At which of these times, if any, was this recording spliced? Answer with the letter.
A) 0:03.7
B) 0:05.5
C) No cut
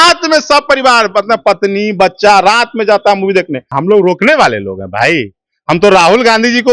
A